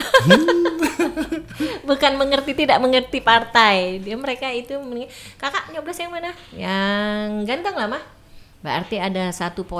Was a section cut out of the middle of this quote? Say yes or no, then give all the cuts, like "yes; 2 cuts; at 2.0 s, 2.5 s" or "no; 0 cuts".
no; 0 cuts